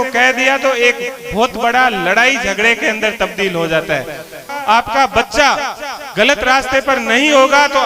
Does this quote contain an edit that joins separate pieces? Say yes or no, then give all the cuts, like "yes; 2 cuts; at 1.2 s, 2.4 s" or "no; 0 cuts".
yes; 1 cut; at 4.4 s